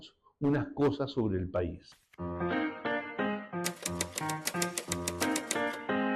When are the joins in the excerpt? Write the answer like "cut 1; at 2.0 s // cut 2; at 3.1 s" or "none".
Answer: cut 1; at 1.9 s